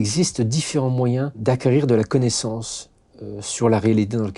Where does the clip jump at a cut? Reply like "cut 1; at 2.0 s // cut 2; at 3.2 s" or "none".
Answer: cut 1; at 1.4 s